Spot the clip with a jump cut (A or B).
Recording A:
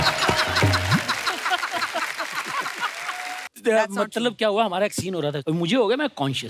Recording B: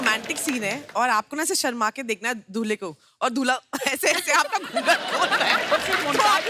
A